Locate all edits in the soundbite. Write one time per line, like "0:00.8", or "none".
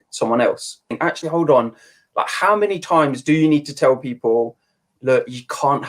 0:01.0